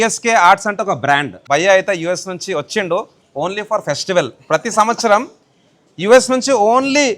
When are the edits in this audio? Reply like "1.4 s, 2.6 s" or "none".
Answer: 1.4 s